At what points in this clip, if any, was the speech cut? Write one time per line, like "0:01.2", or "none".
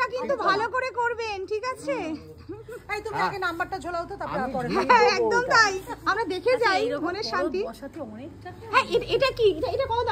none